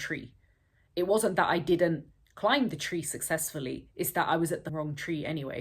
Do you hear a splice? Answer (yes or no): yes